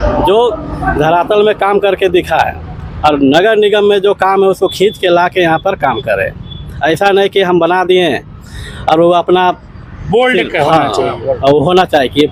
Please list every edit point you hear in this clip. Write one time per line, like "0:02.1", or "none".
none